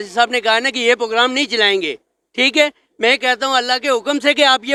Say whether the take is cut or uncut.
uncut